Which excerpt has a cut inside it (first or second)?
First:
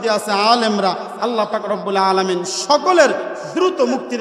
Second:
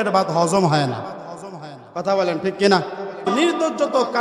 second